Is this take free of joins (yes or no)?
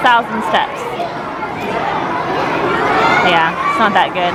yes